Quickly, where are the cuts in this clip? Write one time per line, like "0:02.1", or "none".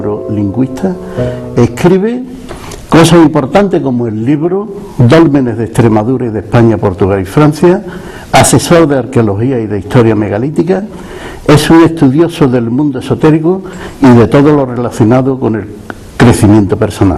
0:06.1

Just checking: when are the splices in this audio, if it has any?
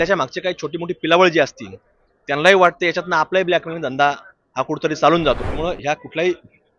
0:05.5

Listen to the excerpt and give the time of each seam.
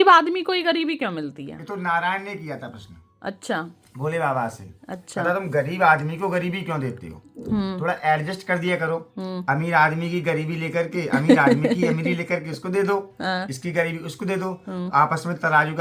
none

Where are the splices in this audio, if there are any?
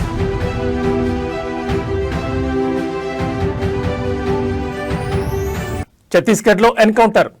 0:05.3

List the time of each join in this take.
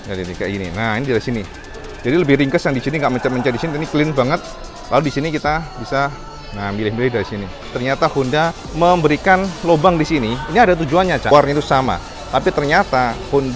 0:07.7
0:08.6
0:11.3

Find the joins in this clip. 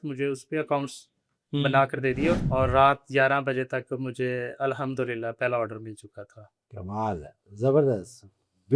0:02.4

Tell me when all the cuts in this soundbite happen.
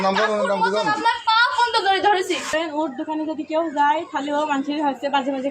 0:02.5

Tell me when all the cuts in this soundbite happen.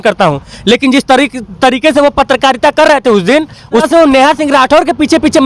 0:03.8

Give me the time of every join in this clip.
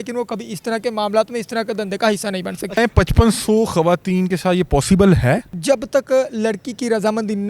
0:02.8
0:05.5

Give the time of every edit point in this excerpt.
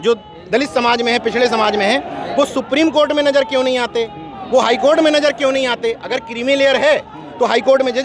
none

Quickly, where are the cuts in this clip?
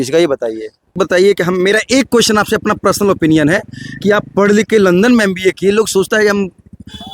0:01.0

